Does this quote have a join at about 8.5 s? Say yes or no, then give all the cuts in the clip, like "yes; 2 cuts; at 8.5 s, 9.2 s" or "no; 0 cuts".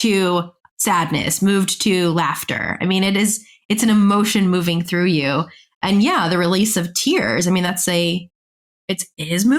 no; 0 cuts